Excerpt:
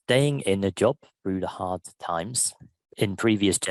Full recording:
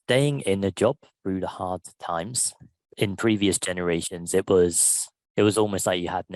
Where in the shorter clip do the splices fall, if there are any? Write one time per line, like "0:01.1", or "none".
none